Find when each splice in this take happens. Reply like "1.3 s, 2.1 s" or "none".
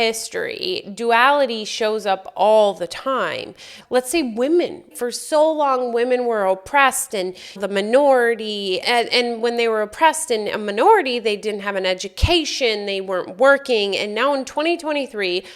3.7 s, 4.9 s